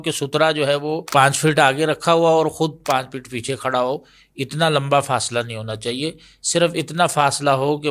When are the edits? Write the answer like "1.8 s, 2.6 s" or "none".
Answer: 1.0 s